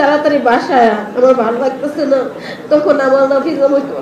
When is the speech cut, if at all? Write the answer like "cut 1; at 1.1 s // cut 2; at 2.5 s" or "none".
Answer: none